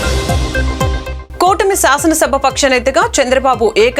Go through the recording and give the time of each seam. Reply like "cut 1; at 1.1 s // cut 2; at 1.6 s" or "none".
cut 1; at 1.2 s